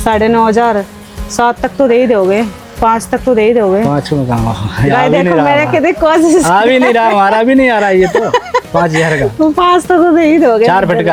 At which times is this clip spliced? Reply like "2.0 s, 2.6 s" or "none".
none